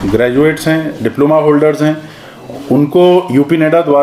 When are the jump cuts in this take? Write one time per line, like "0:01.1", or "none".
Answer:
none